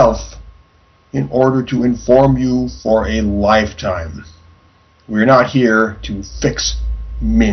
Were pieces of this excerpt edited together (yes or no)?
no